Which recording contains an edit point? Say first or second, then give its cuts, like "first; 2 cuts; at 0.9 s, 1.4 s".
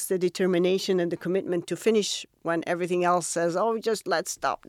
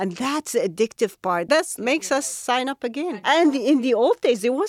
second; 2 cuts; at 1.6 s, 3.2 s